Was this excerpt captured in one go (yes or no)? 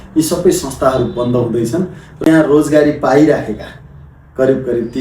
no